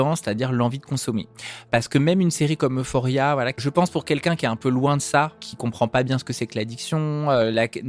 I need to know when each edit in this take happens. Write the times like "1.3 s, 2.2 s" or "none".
1.7 s, 3.6 s